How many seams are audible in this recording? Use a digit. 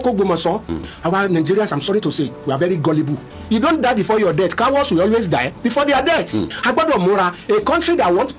3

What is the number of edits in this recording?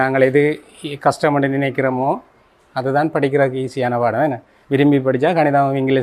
0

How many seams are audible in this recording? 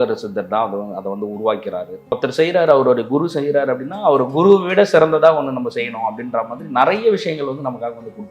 1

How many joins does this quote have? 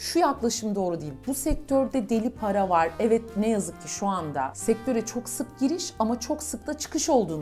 0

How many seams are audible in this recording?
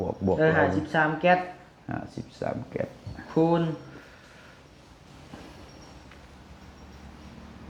0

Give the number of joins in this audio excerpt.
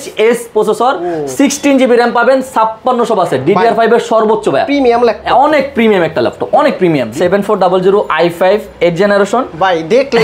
1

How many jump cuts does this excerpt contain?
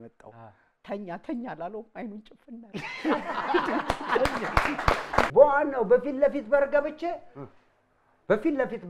1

